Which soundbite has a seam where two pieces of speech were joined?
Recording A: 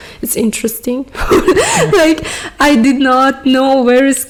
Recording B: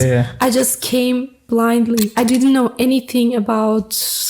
B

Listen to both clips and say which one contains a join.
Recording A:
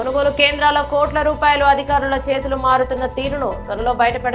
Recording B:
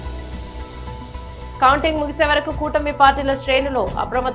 B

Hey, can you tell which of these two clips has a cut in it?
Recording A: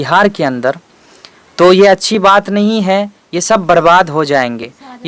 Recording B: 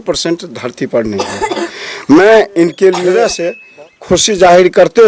B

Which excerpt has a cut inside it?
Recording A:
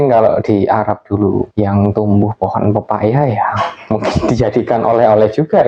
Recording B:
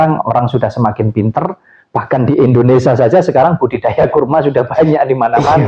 A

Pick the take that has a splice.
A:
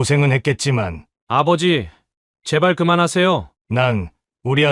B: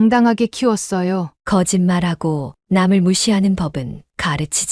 A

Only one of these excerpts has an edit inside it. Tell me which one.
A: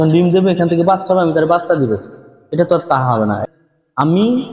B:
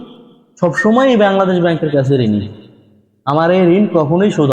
A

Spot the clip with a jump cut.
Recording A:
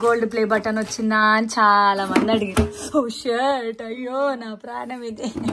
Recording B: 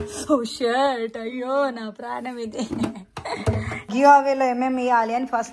B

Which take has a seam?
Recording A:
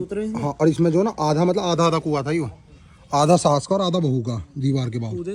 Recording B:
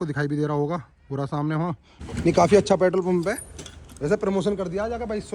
B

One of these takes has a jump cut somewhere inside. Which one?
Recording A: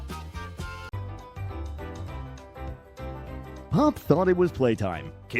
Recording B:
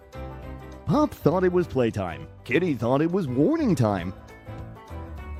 A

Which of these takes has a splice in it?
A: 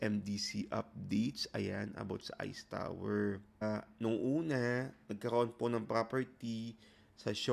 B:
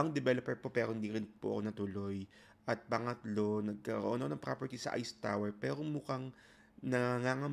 A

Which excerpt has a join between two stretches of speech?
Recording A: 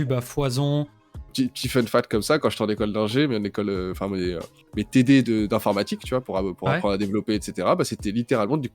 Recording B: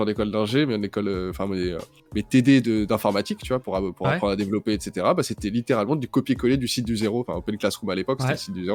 A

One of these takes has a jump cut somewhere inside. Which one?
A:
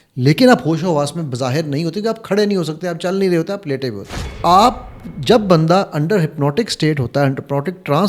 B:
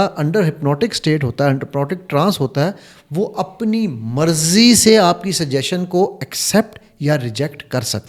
A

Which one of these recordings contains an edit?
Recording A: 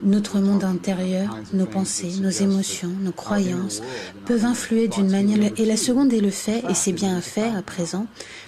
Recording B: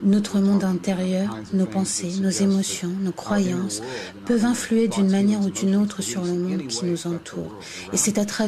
B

